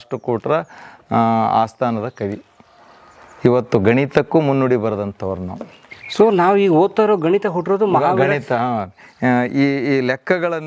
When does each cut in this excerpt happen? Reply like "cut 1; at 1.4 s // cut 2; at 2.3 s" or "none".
none